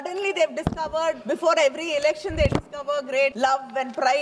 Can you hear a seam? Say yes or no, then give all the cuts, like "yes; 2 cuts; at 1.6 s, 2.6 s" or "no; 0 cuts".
yes; 2 cuts; at 1.2 s, 3.3 s